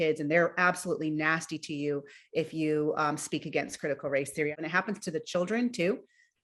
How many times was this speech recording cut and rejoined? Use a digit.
1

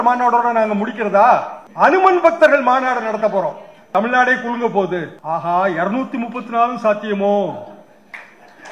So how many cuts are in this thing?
3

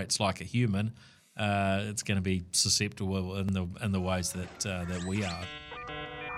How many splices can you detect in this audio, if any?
2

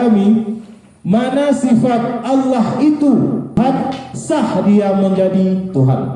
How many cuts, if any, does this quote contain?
1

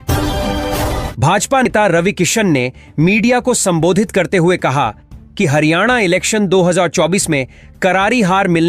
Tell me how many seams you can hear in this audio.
1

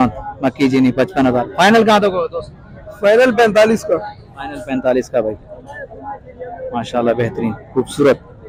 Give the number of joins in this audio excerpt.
0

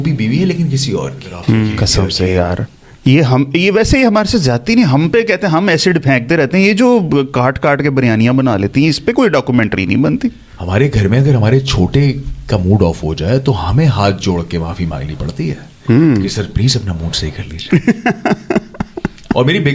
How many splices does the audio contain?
2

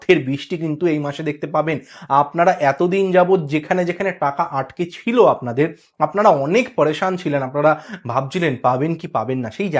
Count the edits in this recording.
0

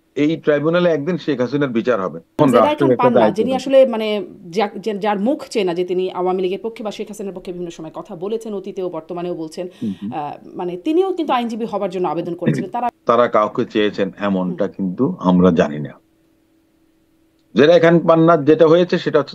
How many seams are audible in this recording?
2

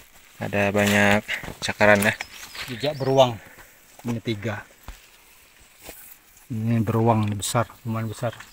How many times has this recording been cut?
0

